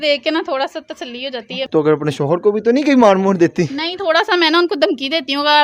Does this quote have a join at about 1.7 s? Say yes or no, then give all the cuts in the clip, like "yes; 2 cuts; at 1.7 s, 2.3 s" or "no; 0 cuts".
yes; 1 cut; at 1.7 s